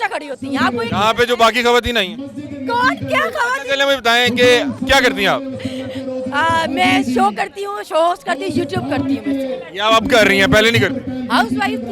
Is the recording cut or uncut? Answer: uncut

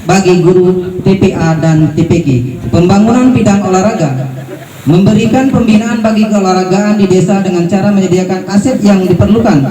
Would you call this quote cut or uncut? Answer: cut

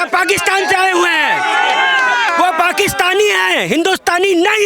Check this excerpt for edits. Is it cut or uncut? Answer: uncut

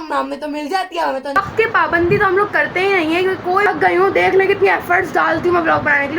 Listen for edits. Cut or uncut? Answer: cut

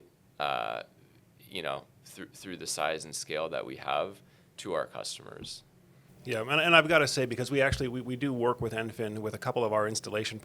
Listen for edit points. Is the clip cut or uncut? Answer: cut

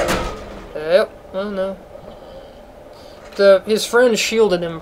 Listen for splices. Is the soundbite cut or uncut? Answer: uncut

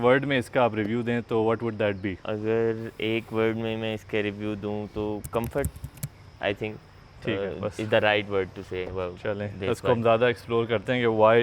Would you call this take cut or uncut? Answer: uncut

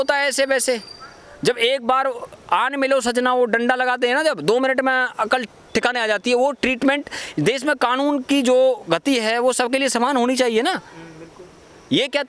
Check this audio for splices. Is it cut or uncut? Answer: uncut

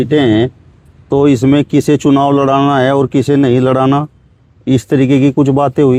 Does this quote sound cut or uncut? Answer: uncut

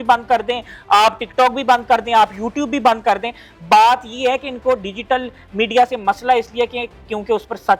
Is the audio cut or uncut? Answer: uncut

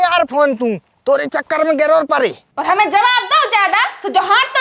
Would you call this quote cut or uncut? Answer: cut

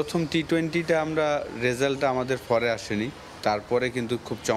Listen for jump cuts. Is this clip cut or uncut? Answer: cut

